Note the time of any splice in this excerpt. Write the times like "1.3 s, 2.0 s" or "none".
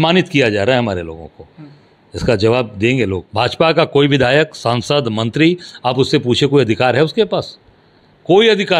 3.2 s